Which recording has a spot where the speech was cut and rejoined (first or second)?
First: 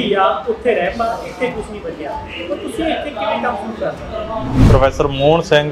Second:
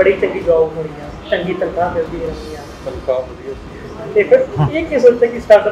first